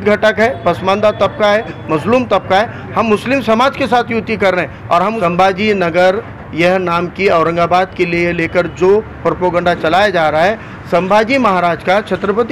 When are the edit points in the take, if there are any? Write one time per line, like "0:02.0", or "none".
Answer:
0:05.1